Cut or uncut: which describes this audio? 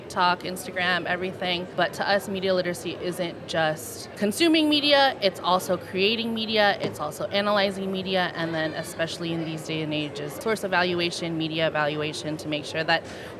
cut